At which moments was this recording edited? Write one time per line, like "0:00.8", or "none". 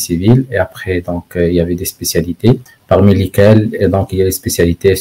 0:02.7

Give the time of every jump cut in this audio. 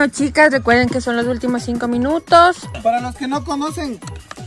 0:02.8

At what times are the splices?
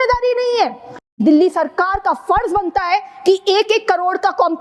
0:01.2

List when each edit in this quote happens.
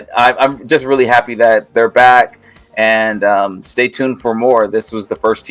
none

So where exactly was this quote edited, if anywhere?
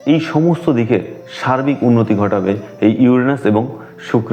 none

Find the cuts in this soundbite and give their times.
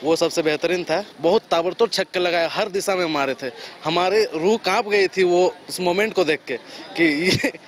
0:01.1

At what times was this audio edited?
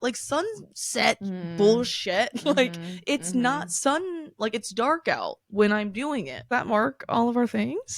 0:06.5

